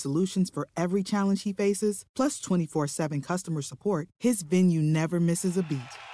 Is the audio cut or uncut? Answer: uncut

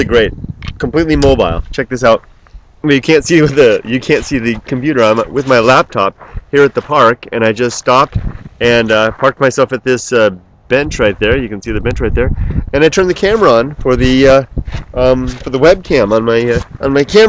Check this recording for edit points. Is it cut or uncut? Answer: cut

